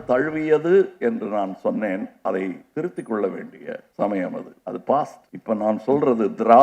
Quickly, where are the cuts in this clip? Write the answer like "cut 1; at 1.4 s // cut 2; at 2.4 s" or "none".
cut 1; at 2.6 s // cut 2; at 3.9 s // cut 3; at 4.5 s // cut 4; at 5.3 s